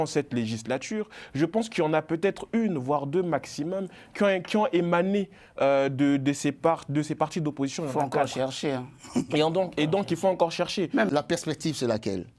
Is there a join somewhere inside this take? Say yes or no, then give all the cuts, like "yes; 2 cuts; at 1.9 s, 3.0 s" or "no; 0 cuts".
yes; 1 cut; at 11.1 s